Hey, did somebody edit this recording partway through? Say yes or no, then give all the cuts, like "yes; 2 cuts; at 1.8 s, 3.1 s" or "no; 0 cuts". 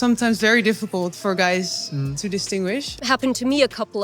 yes; 1 cut; at 2.9 s